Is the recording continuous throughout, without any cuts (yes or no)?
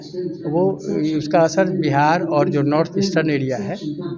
yes